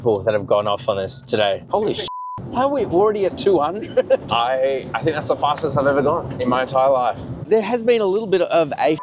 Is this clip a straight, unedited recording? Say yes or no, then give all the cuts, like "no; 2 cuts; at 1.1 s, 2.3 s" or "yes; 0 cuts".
no; 3 cuts; at 1.6 s, 4.3 s, 7.4 s